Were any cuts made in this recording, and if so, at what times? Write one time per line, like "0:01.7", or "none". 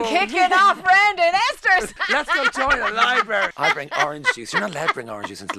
0:02.0
0:03.5